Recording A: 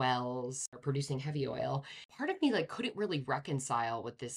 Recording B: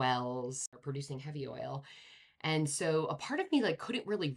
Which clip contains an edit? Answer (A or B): A